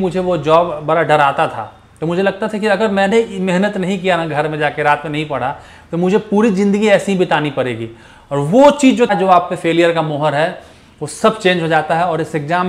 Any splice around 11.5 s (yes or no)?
no